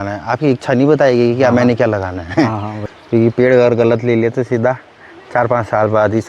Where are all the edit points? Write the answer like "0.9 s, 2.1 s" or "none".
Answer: 2.8 s